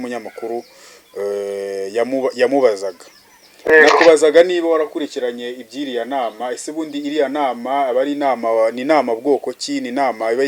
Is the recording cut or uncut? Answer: uncut